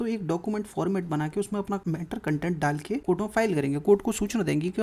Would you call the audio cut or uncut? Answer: cut